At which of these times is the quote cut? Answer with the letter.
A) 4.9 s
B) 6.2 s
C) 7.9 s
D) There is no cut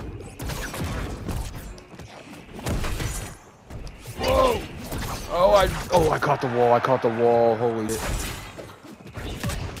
C